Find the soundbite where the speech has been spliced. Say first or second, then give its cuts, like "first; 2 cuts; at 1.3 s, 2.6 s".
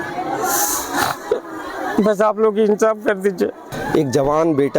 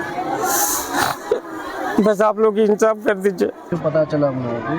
first; 1 cut; at 3.6 s